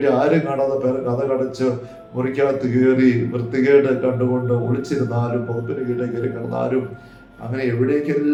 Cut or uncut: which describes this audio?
uncut